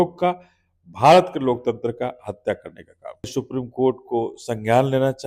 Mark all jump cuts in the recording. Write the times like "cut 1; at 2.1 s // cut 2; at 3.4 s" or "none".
cut 1; at 3.3 s